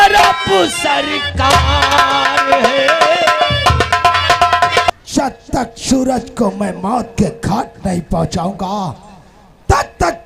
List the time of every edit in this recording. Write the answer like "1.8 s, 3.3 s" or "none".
4.9 s